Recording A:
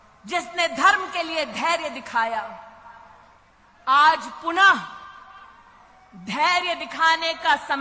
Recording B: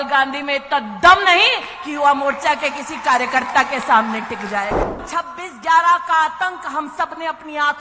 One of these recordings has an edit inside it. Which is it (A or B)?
B